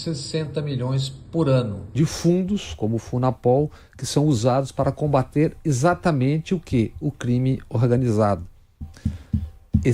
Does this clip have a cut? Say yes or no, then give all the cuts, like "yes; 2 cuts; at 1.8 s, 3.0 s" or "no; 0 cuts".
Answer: yes; 1 cut; at 1.8 s